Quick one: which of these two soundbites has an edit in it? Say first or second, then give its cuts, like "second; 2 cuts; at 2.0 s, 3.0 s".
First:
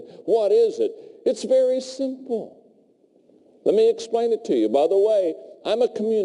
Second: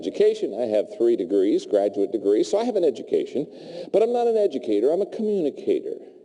second; 1 cut; at 2.9 s